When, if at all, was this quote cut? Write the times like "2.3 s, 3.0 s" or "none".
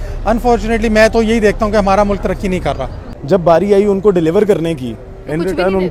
none

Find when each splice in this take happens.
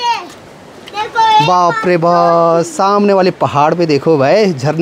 none

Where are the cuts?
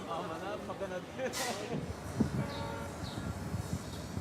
2.0 s

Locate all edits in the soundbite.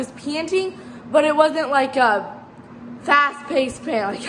none

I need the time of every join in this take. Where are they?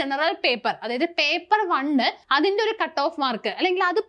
2.2 s

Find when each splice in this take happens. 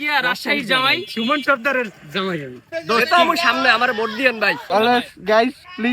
1.1 s, 2.6 s, 4.6 s

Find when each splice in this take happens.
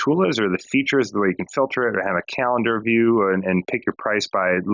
none

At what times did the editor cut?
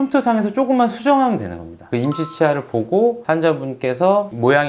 1.9 s

